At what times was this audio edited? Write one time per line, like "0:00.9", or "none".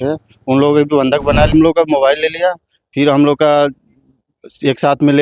0:01.5